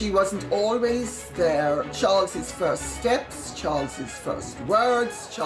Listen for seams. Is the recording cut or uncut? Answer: cut